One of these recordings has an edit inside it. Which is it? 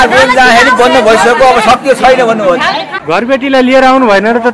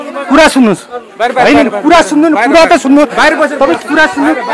first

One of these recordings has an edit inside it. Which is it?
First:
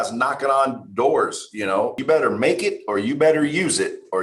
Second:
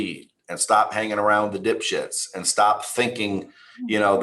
first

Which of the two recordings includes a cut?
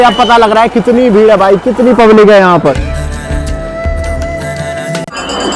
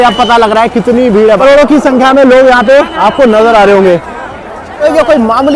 second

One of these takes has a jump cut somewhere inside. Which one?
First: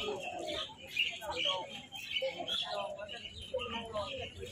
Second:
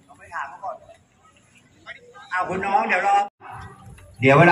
second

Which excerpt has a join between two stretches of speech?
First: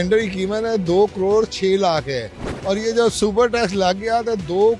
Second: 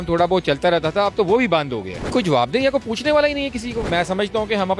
second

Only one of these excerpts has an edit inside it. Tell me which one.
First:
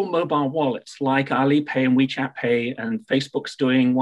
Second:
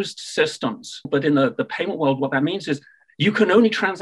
second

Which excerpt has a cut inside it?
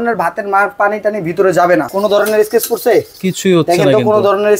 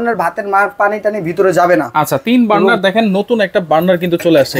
first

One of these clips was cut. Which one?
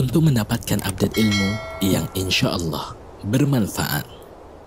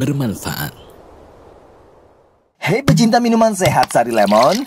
second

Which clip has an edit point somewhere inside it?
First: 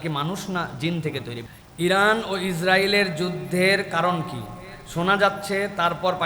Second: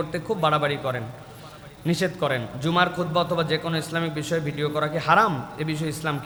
first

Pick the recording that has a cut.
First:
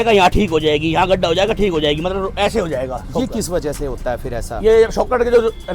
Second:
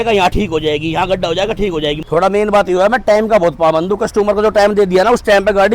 second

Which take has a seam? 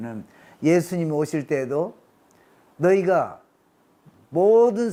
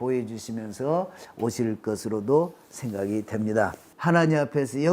second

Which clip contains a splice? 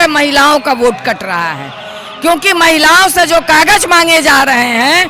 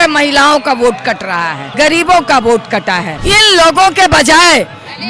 second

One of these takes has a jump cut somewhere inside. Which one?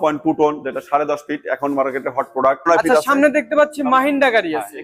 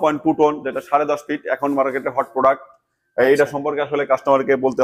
first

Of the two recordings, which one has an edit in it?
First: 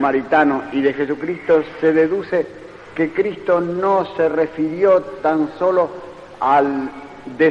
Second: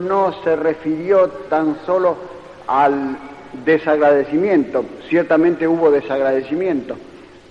first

